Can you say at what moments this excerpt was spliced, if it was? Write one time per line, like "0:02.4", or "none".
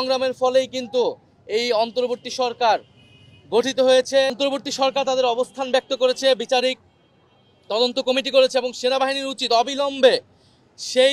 0:04.3